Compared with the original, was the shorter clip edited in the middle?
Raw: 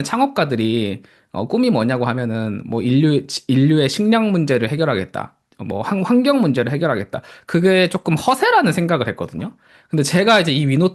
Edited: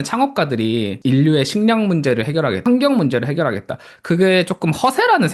yes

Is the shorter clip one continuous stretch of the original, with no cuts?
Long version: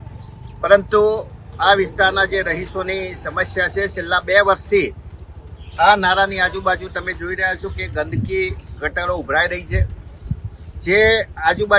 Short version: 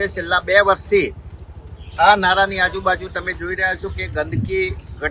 yes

